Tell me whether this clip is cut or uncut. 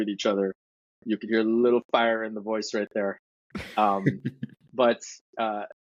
uncut